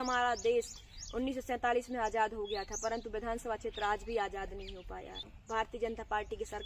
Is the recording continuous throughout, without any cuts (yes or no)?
no